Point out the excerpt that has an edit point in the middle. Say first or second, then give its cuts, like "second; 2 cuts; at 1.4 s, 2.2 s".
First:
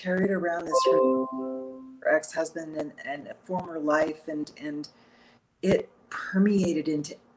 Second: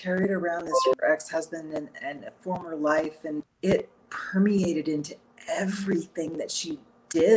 second; 2 cuts; at 0.9 s, 3.5 s